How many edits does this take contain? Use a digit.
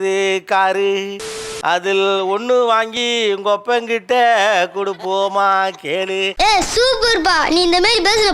1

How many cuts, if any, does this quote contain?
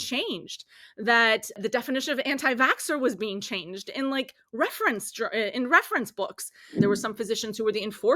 2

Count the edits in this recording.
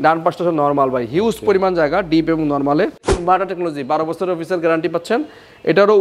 1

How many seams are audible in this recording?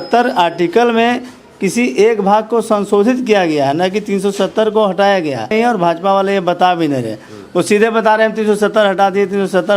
1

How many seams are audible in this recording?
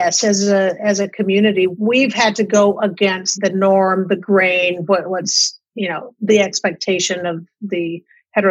2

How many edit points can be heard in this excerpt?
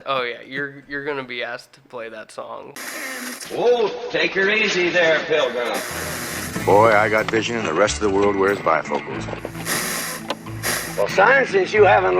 1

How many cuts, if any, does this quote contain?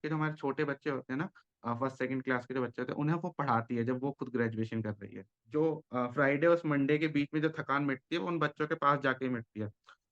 1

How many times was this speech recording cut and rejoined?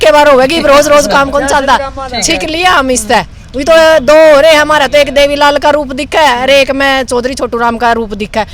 0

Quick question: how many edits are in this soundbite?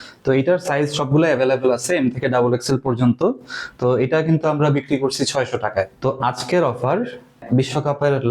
2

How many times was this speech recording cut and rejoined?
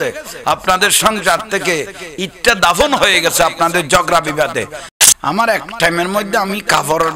1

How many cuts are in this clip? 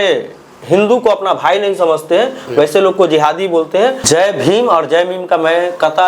1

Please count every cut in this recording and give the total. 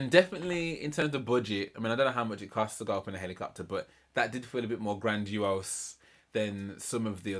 0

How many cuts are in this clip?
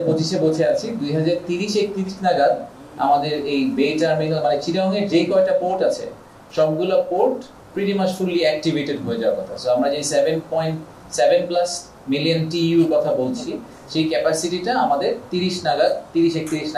0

